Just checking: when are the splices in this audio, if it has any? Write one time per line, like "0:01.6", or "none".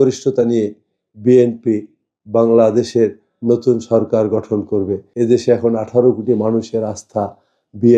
0:05.0